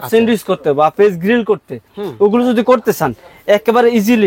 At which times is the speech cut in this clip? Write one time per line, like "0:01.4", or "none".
none